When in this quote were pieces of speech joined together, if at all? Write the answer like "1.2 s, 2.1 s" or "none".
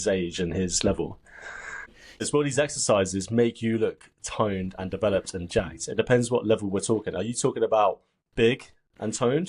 2.2 s